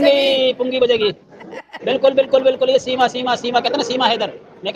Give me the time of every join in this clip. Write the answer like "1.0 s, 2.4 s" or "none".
none